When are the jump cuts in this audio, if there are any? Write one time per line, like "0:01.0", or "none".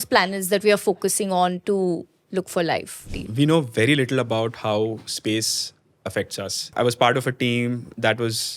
0:03.2
0:06.7